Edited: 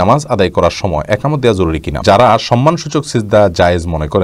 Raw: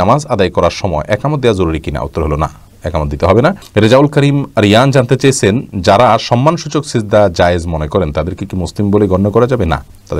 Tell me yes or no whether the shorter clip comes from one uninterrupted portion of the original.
no